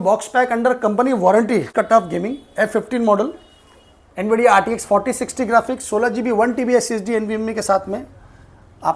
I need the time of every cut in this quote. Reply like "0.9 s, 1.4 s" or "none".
1.7 s